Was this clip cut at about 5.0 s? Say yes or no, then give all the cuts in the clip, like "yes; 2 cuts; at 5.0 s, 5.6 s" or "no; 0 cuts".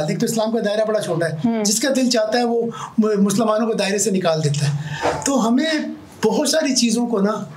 no; 0 cuts